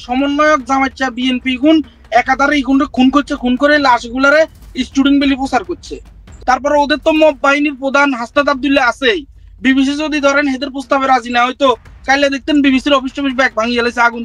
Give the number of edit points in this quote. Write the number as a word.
one